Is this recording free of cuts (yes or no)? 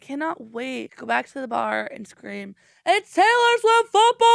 no